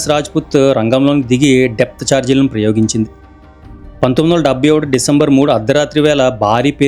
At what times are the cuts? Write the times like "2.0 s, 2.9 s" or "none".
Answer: none